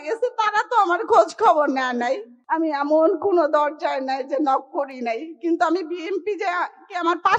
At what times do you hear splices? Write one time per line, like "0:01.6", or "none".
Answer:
0:02.3